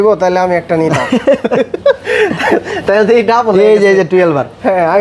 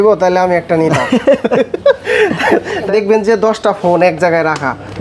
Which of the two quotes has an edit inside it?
second; 1 cut; at 2.9 s

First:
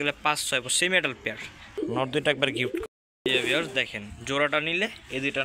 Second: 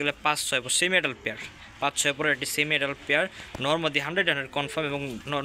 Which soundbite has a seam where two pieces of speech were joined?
first; 1 cut; at 1.8 s

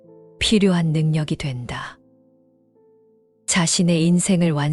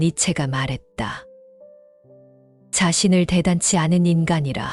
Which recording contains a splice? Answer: first; 2 cuts; at 2.0 s, 3.5 s

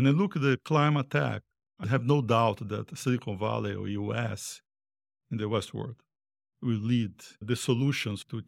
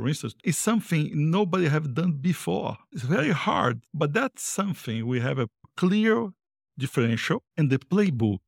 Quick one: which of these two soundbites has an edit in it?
second; 3 cuts; at 2.9 s, 3.9 s, 7.5 s

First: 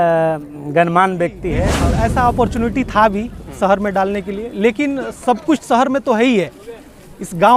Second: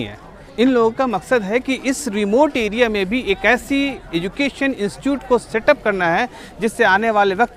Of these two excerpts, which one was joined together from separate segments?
first; 1 cut; at 1.7 s

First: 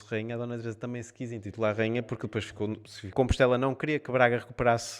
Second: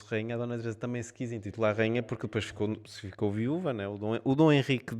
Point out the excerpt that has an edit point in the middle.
first; 1 cut; at 3.1 s

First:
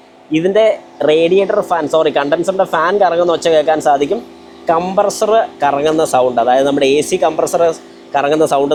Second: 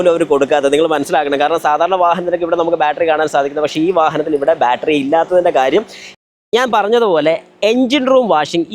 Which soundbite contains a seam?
second; 1 cut; at 6.2 s

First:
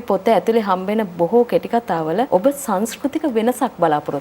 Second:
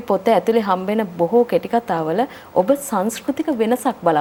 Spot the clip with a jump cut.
first; 1 cut; at 2.3 s

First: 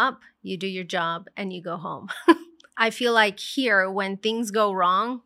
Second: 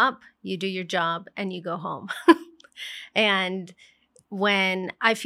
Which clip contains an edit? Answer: first; 1 cut; at 2.6 s

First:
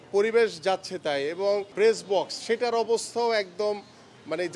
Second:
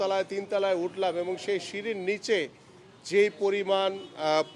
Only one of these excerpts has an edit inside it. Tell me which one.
first; 1 cut; at 1.7 s

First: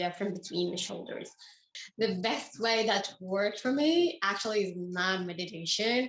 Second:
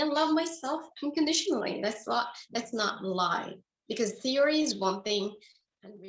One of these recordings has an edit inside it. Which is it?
first; 1 cut; at 1.7 s

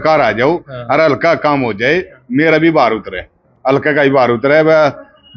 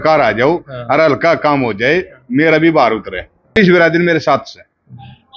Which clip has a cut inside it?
second; 1 cut; at 3.5 s

